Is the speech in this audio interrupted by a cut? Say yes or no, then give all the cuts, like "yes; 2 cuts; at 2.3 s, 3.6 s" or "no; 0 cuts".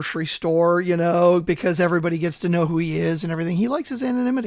no; 0 cuts